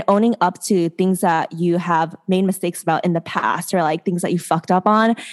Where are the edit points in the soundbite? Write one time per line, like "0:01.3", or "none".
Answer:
none